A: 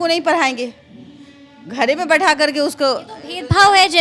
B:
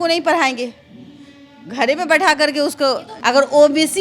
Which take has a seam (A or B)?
B